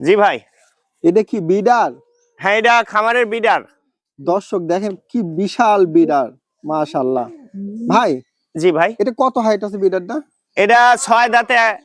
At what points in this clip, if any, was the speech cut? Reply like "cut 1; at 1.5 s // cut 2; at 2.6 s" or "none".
none